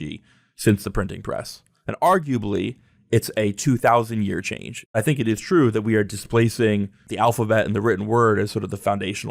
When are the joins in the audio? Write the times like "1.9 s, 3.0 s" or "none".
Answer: 5.0 s, 7.1 s

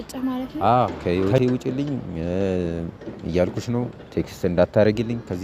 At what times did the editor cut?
1.0 s

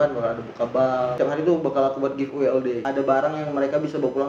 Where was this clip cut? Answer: 1.1 s, 2.8 s

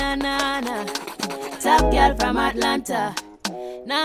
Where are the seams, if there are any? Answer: none

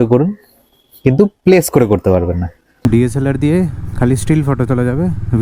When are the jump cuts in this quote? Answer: 2.6 s

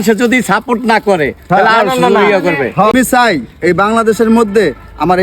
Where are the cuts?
2.9 s

